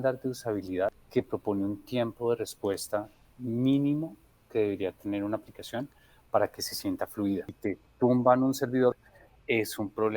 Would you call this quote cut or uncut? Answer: cut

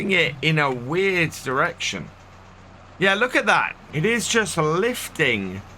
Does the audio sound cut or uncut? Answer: cut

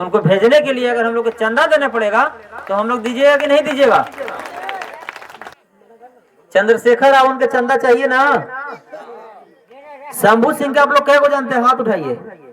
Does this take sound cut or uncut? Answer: cut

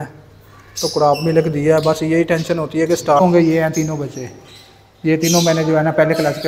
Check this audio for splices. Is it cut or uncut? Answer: cut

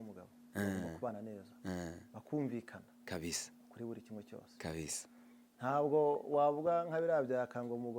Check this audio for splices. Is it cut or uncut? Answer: uncut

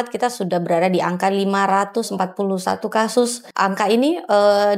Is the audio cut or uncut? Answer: cut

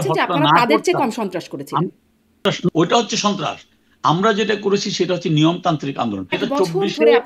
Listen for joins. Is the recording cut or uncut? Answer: cut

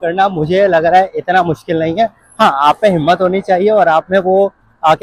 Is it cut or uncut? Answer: uncut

